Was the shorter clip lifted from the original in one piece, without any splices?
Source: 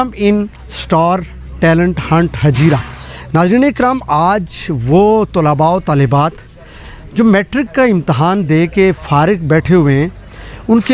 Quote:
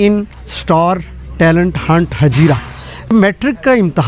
no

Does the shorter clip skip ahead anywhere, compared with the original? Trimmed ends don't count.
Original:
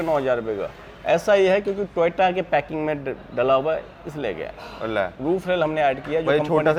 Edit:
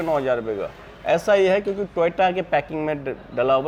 no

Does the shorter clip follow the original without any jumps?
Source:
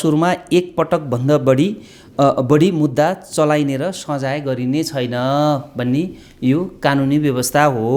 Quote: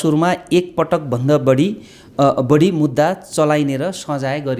yes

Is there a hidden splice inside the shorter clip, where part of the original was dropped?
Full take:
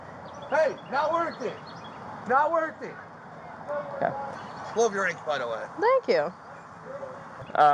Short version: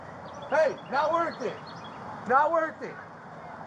no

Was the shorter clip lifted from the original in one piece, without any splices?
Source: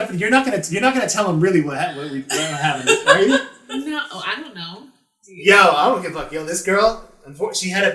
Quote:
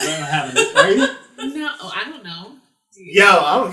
yes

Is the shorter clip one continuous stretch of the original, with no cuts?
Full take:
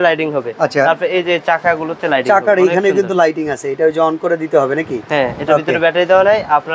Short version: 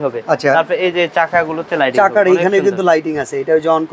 yes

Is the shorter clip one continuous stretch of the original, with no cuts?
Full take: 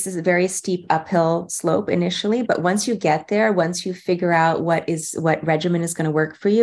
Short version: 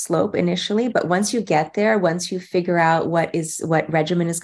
yes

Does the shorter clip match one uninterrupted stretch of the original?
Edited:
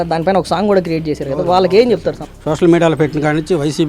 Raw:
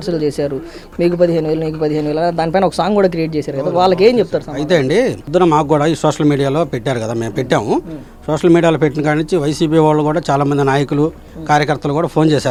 no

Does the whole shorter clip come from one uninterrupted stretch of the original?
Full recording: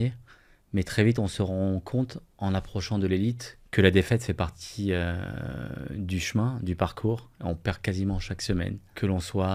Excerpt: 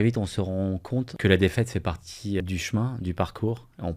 no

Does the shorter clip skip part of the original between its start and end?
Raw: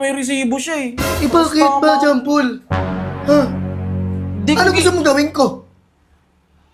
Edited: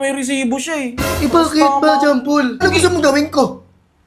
yes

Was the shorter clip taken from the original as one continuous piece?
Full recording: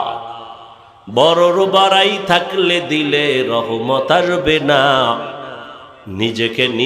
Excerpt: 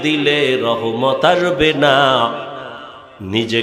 yes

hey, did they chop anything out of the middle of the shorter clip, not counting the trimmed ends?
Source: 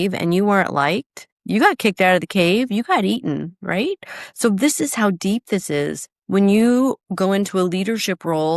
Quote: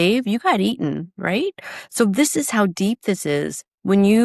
no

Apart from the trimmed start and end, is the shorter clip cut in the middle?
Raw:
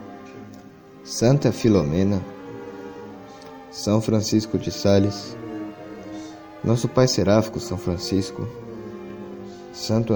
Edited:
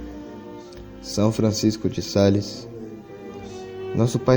no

